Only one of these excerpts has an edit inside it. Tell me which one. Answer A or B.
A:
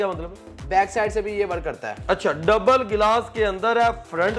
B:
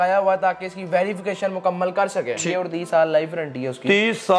B